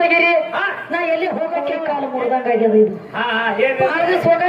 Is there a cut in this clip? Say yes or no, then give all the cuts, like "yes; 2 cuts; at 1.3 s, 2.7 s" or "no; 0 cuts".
yes; 1 cut; at 1.8 s